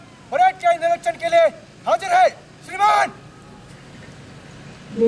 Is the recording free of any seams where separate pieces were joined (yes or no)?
yes